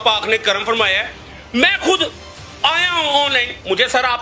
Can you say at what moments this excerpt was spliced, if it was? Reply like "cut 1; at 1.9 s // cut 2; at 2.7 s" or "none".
none